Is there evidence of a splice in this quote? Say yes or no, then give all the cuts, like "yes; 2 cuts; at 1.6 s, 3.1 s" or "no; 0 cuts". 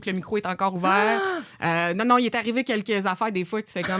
no; 0 cuts